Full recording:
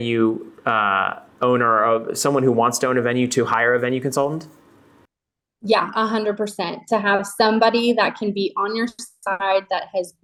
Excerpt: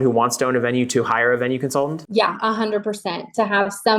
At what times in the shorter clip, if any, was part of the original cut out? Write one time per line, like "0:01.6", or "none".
0:02.0